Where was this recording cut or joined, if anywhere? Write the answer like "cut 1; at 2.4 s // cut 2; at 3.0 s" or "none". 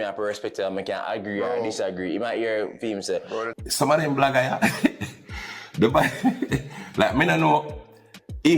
cut 1; at 3.5 s